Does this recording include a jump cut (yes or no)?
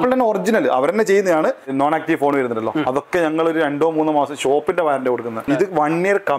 yes